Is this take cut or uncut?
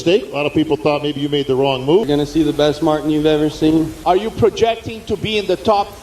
cut